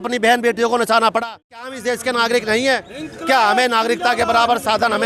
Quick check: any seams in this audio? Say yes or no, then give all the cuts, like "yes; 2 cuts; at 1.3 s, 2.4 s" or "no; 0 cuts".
yes; 1 cut; at 1.7 s